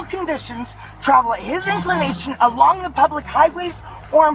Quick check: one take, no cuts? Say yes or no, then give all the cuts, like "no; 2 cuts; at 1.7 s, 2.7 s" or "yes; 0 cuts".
yes; 0 cuts